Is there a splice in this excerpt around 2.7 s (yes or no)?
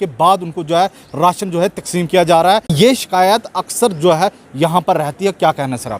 yes